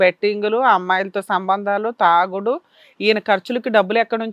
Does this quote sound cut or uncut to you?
uncut